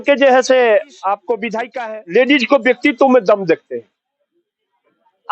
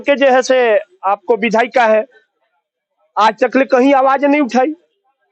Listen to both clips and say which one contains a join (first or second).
first